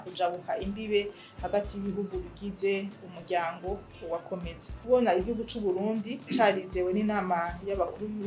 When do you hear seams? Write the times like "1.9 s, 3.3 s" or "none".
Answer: 4.7 s